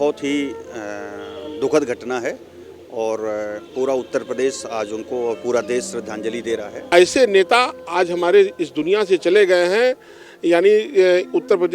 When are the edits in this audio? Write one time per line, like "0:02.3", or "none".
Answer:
0:06.8